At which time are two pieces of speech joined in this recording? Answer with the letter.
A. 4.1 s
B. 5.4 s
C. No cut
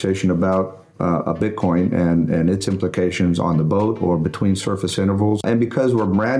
B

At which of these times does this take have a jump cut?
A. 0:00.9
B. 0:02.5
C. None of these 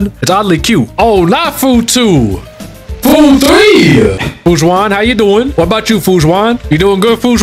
A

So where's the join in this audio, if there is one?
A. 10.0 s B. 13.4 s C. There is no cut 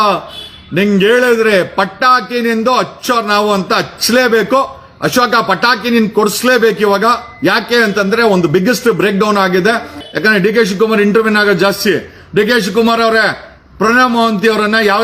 A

